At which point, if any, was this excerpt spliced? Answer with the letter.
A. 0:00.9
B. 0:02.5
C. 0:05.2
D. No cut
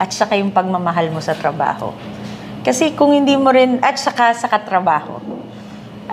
D